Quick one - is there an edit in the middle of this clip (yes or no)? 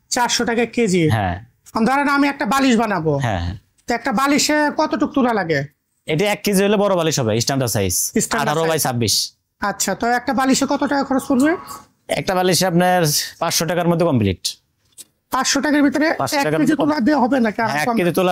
no